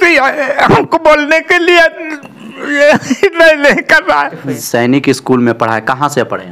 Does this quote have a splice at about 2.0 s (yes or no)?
no